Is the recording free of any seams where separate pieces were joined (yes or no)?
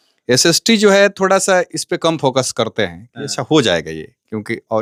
yes